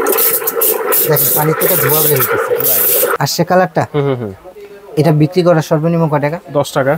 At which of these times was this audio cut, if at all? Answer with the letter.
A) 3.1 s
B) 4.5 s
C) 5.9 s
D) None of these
A